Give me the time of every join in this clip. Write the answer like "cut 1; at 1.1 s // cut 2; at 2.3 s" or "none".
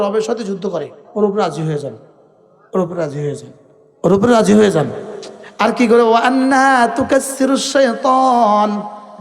cut 1; at 1.0 s